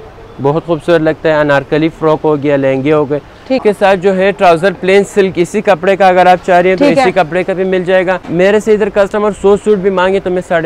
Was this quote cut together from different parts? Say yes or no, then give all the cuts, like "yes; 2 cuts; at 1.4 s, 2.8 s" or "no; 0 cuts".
yes; 2 cuts; at 3.6 s, 8.2 s